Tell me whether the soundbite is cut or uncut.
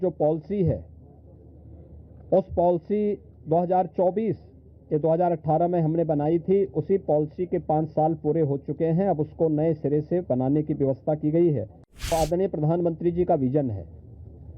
cut